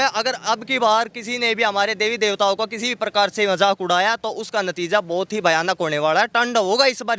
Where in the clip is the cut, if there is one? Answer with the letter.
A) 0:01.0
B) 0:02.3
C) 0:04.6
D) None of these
D